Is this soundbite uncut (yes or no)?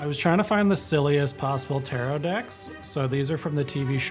yes